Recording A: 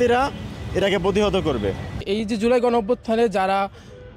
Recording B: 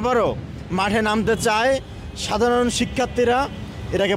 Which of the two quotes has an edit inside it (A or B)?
A